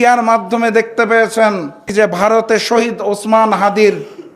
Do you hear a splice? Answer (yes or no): yes